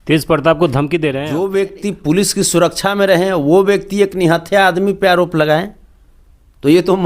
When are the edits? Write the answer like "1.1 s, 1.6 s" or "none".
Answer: 1.2 s